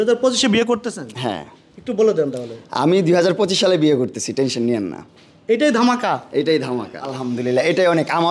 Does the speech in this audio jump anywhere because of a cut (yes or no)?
yes